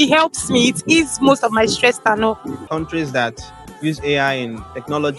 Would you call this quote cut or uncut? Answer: cut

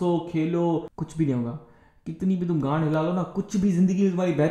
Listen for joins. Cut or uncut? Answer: cut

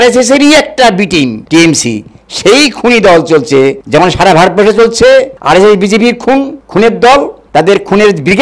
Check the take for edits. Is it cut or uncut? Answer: cut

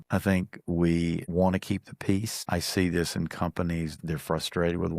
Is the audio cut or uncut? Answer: cut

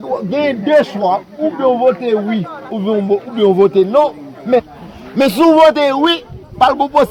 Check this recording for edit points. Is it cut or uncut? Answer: cut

